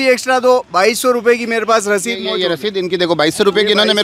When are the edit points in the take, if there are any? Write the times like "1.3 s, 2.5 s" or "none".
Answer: none